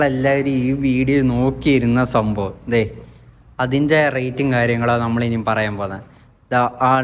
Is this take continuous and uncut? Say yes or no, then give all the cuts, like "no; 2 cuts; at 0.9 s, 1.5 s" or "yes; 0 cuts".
yes; 0 cuts